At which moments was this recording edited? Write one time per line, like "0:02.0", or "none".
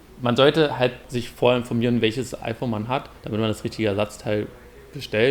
0:01.1
0:02.3